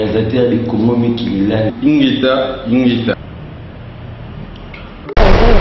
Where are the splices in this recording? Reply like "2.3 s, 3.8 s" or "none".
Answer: none